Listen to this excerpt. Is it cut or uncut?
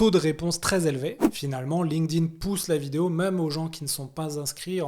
cut